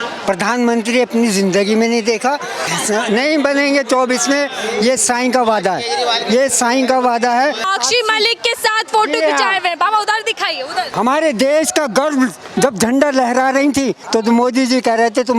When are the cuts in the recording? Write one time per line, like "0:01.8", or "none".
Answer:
0:02.7
0:07.6
0:10.9